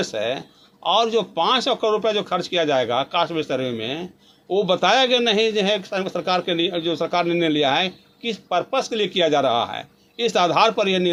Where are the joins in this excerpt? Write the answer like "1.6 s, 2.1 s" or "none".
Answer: none